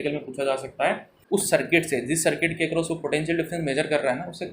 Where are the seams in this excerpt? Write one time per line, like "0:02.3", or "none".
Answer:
0:01.1